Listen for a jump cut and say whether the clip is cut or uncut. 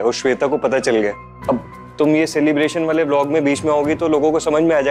uncut